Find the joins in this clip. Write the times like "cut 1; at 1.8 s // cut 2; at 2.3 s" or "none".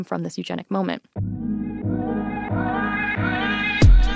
cut 1; at 1.2 s